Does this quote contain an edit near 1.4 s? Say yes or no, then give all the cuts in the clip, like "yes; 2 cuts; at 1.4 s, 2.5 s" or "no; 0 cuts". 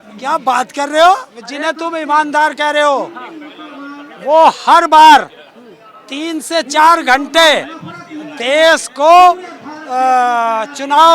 yes; 1 cut; at 1.4 s